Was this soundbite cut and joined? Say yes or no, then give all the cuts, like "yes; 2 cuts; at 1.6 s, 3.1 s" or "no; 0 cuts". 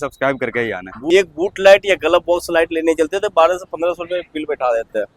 yes; 1 cut; at 1.1 s